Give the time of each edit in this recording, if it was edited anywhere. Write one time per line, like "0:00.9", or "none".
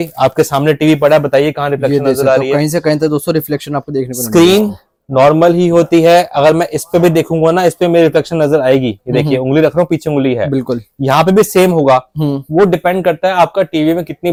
none